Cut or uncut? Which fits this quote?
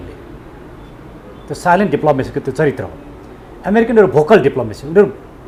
uncut